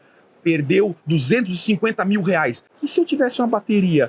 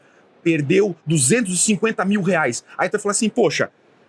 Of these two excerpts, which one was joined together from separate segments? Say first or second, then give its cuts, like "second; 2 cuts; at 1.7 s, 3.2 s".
first; 1 cut; at 2.7 s